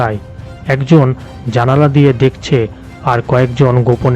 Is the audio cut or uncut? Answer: uncut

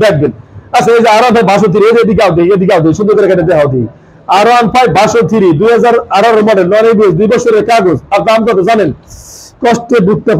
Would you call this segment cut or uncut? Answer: uncut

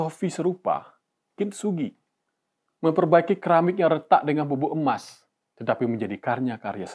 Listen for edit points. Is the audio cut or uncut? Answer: uncut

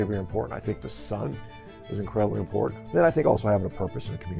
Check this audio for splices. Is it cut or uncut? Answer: cut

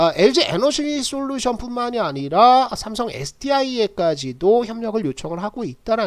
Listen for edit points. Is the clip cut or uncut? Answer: uncut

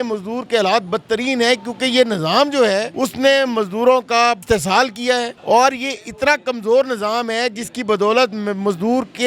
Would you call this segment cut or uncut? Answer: cut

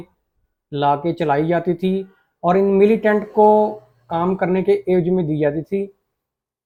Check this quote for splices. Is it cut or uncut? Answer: uncut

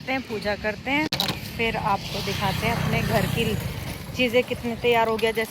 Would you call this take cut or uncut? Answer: uncut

